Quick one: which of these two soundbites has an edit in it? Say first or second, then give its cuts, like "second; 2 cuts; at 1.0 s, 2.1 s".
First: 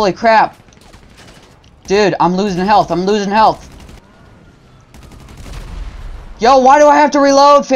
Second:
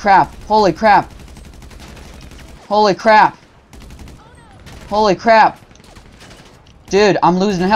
first; 1 cut; at 3.9 s